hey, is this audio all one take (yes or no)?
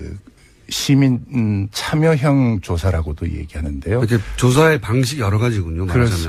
no